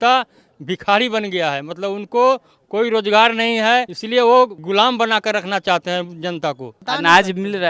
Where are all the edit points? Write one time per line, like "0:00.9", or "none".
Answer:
0:04.0
0:04.6
0:06.7